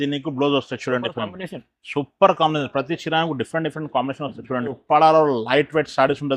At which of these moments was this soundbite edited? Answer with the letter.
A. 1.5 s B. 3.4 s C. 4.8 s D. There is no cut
C